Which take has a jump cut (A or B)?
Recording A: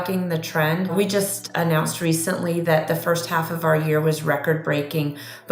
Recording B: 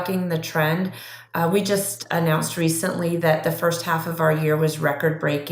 A